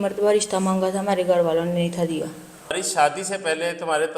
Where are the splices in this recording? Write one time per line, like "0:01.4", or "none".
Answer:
0:02.8

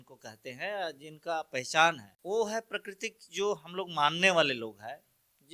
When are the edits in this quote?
0:02.1

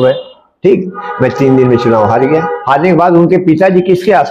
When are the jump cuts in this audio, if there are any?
0:02.6

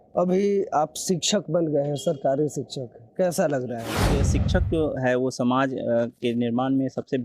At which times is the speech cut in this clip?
0:04.2

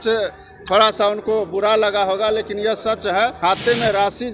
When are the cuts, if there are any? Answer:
0:03.4

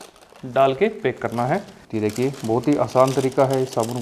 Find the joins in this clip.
0:01.8

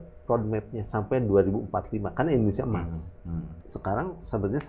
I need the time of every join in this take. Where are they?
0:03.7

